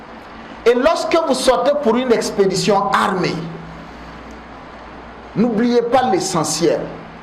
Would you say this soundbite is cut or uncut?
uncut